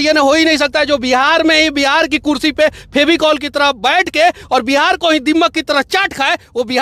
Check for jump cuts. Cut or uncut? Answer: uncut